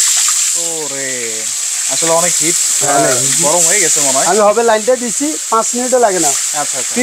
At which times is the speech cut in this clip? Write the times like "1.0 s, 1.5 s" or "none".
none